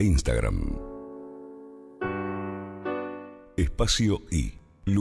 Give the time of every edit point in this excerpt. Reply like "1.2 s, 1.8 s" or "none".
none